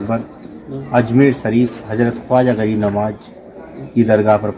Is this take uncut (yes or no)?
yes